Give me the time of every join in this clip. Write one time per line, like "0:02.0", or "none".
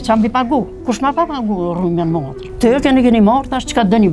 0:02.4